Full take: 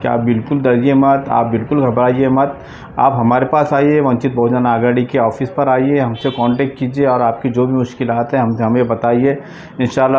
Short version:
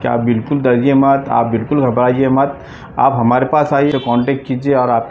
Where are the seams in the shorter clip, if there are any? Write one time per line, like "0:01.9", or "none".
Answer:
0:03.9